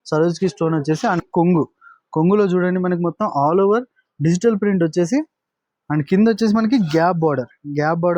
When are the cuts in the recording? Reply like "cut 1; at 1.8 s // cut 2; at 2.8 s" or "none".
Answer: cut 1; at 1.2 s